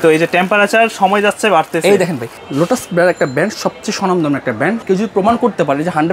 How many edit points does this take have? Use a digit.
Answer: 2